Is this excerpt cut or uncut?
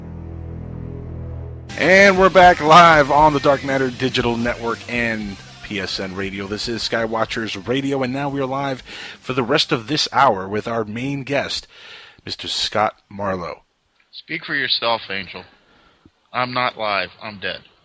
cut